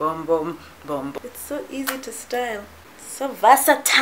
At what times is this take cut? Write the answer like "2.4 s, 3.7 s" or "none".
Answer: 1.1 s